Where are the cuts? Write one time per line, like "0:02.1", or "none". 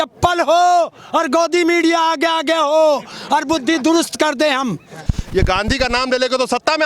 0:05.1